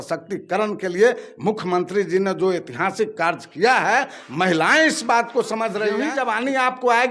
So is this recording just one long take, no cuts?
no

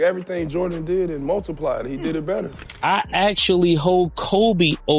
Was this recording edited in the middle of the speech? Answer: yes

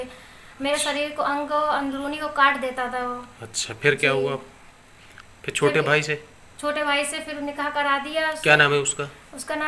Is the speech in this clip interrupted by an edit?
no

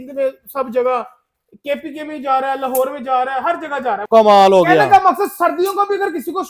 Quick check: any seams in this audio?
yes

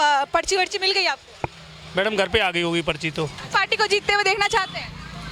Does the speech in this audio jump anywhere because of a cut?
yes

